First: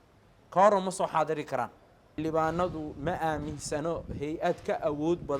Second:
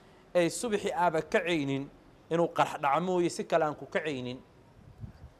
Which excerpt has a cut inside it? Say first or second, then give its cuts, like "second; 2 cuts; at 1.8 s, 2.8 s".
first; 1 cut; at 2.2 s